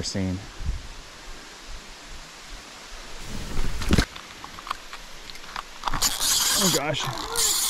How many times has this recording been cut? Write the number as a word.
one